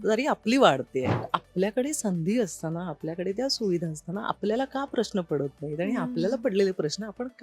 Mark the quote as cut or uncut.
cut